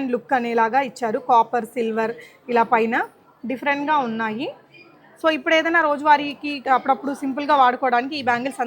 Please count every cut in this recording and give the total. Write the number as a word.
one